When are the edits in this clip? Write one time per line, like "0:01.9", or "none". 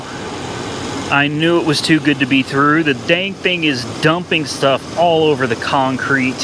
none

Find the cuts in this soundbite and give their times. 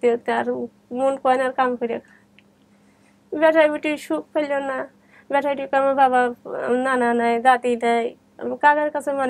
none

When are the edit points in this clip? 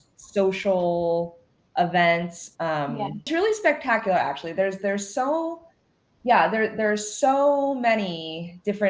0:03.3

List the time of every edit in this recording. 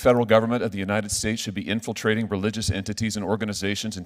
none

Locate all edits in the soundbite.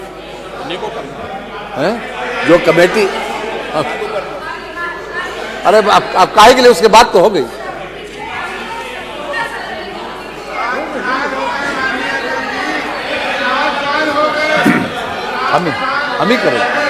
none

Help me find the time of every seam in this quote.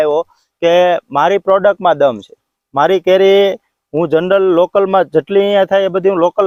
none

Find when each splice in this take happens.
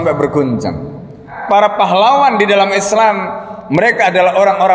0:01.3

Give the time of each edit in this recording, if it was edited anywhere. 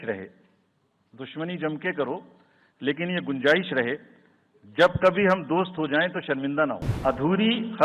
0:06.9

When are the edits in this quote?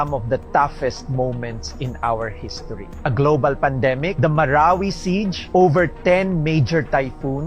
0:02.9
0:05.4

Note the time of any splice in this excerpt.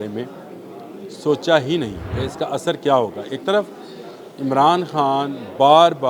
0:02.0

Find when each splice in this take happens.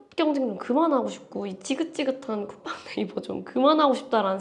none

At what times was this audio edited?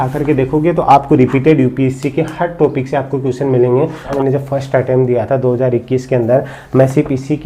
0:04.1

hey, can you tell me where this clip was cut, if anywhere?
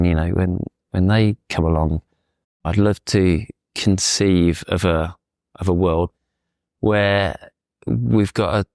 0:02.6
0:06.1

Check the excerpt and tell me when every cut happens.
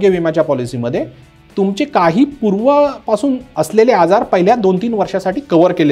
none

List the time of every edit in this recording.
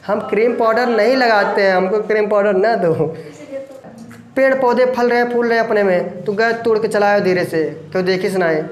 0:03.8

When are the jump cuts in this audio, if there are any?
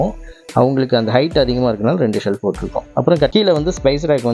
0:03.3

